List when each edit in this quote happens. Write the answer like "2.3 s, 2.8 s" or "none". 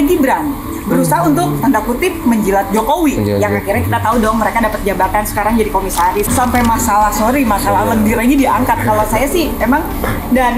6.3 s